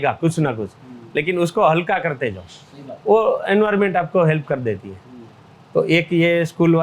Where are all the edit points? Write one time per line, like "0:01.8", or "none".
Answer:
none